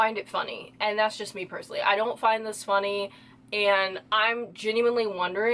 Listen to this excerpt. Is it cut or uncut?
uncut